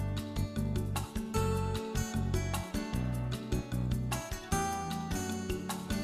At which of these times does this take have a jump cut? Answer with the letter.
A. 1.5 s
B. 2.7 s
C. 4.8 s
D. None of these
B